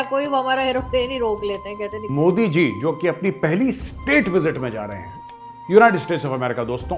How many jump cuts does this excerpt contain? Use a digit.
1